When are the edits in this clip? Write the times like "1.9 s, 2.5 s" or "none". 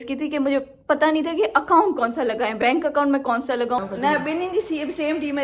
3.8 s